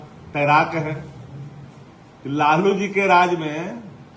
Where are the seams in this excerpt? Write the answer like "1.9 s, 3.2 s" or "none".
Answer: none